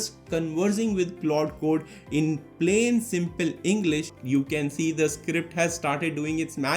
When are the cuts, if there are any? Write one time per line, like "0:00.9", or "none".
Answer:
0:04.1